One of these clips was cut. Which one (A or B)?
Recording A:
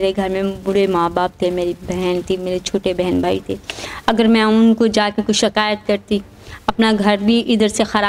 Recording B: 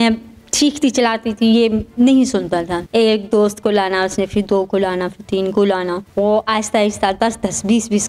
B